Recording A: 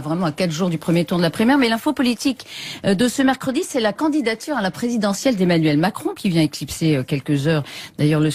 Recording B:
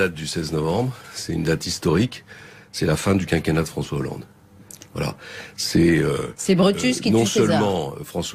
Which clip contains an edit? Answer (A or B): B